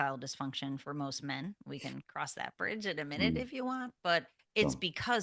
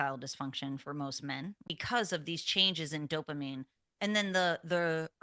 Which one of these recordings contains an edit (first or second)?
second